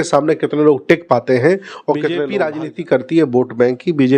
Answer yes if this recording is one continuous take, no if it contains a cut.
no